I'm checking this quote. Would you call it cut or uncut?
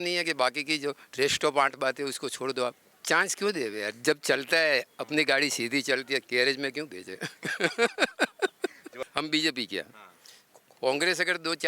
cut